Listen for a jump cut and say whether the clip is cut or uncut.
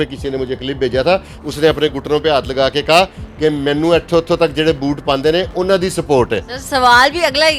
uncut